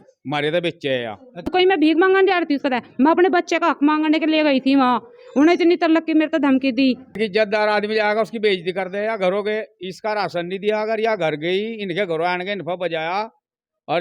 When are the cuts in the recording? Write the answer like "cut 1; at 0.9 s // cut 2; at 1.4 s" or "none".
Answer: cut 1; at 1.5 s // cut 2; at 7.2 s